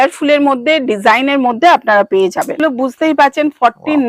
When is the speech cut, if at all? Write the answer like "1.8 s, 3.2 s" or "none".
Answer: 2.6 s